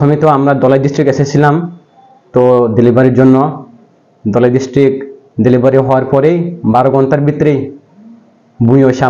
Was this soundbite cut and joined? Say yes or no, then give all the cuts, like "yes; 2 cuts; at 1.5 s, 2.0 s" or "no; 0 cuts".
no; 0 cuts